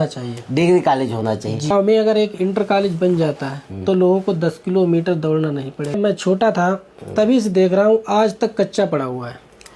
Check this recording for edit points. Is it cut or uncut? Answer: cut